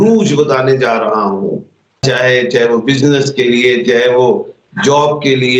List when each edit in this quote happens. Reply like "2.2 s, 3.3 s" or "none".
2.0 s